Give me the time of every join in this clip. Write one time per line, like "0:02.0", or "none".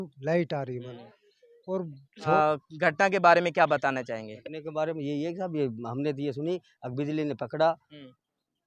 0:02.4